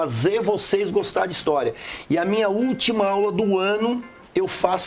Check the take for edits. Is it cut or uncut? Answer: uncut